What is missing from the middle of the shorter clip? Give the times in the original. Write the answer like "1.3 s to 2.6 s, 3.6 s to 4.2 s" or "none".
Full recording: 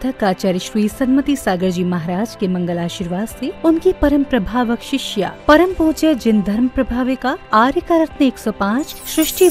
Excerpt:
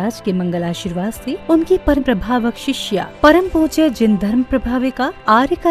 4.1 s to 4.2 s